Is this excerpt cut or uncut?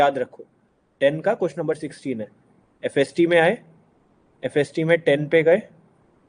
uncut